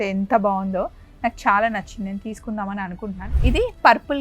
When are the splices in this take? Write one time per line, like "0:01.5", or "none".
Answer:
0:03.2

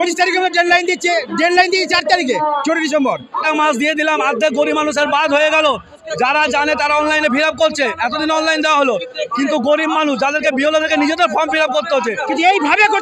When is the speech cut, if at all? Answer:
0:03.4
0:12.2

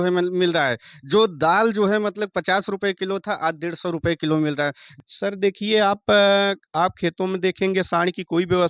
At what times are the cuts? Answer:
0:04.9

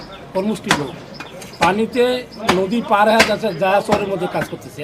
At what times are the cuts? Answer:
none

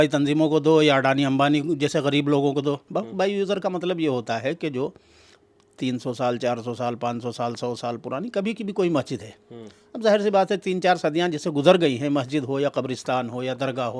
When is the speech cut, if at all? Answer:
0:02.9

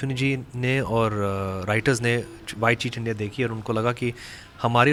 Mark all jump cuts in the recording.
none

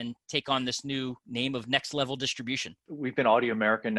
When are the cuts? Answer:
0:01.2
0:02.9

